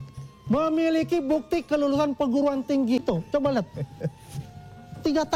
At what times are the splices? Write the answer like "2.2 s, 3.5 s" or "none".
3.0 s